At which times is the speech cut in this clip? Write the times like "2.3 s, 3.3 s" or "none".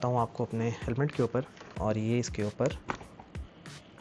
1.6 s